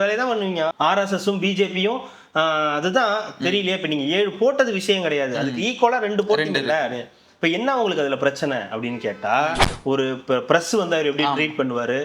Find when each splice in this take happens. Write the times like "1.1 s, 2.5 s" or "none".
9.7 s